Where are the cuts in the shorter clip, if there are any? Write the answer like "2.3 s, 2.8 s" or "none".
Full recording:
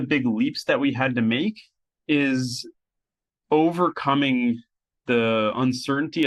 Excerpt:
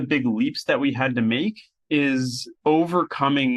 1.7 s, 2.4 s